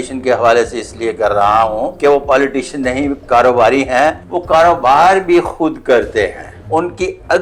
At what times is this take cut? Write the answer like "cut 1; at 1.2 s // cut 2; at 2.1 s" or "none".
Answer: cut 1; at 1.9 s // cut 2; at 4.3 s // cut 3; at 6.5 s